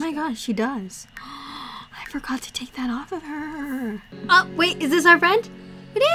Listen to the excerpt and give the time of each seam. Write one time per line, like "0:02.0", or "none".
0:04.1

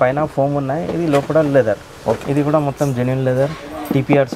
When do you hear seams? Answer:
0:02.2

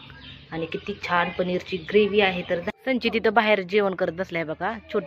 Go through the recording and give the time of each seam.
0:02.7

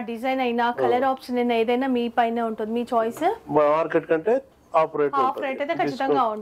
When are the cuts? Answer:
none

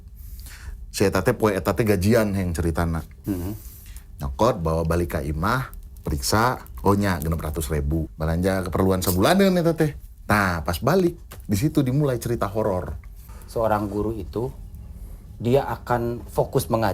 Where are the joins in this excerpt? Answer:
0:03.2
0:08.1
0:12.8

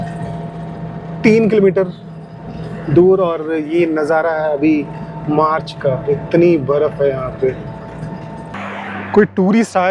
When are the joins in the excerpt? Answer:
0:08.6

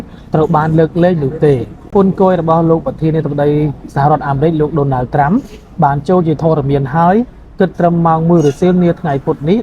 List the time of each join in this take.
0:01.9

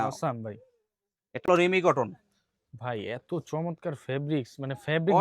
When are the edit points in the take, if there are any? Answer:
0:01.5

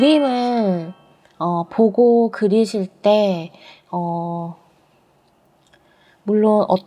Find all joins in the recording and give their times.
none

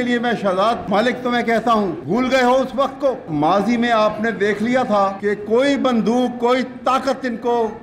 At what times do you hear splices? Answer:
0:00.8
0:02.0
0:03.2
0:05.2

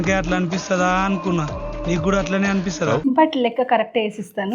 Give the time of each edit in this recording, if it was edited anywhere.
0:03.0

